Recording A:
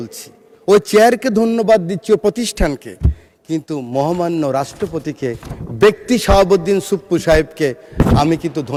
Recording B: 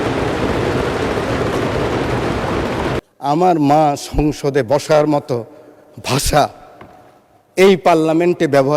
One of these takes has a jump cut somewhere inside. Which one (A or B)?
B